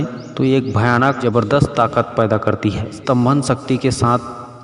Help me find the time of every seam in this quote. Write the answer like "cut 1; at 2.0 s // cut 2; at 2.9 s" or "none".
cut 1; at 1.2 s // cut 2; at 3.0 s